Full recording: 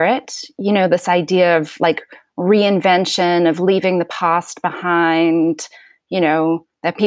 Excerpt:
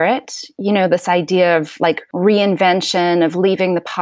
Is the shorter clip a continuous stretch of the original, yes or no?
no